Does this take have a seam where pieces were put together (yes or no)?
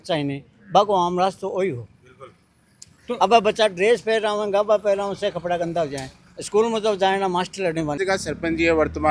yes